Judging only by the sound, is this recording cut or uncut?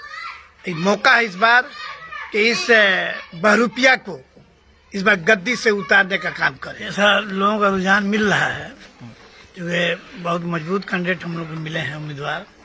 cut